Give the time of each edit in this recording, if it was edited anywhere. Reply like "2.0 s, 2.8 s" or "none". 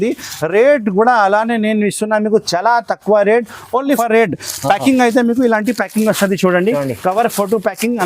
4.0 s